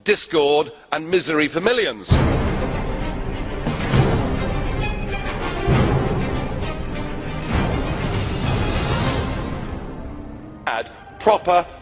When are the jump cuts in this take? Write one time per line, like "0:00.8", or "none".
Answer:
none